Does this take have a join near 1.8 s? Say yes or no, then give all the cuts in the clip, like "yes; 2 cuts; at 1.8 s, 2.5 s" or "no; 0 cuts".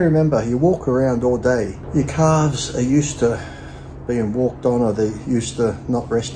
yes; 1 cut; at 1.8 s